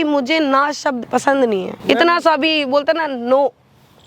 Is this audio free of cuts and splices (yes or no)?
no